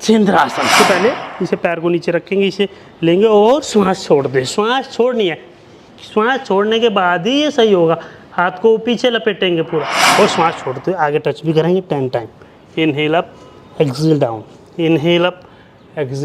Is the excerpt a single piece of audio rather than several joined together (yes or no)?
no